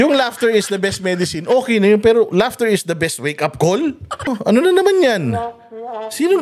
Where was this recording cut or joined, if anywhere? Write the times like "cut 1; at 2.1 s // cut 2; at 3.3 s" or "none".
cut 1; at 4.3 s